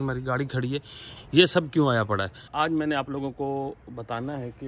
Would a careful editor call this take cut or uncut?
cut